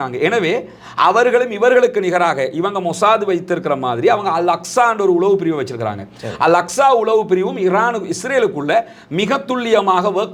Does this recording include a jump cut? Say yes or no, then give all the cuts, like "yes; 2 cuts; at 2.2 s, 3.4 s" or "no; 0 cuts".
no; 0 cuts